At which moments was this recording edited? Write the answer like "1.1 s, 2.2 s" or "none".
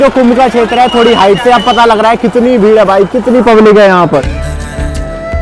none